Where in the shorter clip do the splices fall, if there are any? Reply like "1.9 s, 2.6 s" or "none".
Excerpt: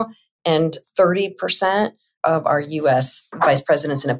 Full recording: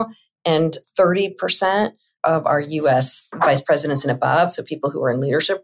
none